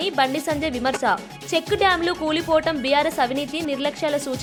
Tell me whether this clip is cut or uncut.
uncut